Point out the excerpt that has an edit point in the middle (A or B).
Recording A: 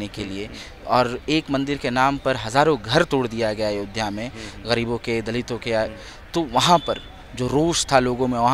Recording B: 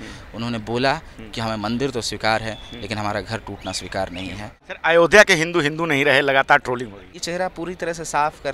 B